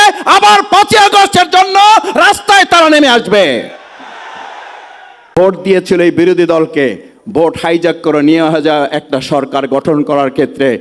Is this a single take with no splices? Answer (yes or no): no